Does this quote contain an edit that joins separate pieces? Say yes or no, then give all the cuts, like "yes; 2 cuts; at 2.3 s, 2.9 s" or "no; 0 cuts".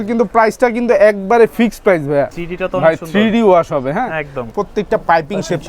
yes; 2 cuts; at 2.4 s, 4.5 s